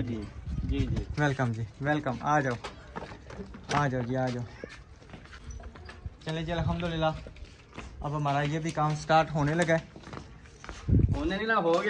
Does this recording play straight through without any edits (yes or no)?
yes